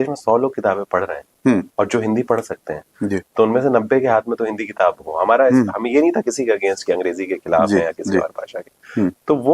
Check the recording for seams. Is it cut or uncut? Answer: uncut